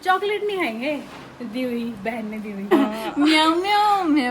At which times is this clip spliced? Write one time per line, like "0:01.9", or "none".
0:02.7